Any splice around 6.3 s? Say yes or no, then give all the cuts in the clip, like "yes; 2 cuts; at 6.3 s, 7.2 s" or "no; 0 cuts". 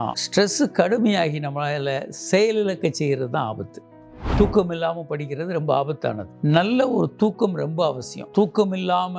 yes; 2 cuts; at 3.8 s, 6.3 s